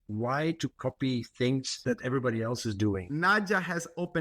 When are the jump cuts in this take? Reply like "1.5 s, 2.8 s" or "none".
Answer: 1.7 s, 3.0 s